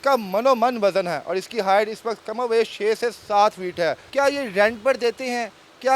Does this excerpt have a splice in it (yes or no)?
yes